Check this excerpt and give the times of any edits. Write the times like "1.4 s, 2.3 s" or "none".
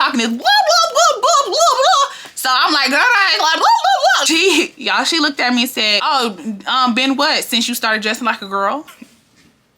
4.2 s